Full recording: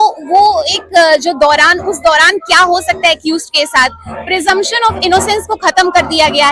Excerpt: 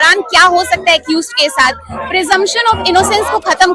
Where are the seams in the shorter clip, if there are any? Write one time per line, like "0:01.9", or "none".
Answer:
none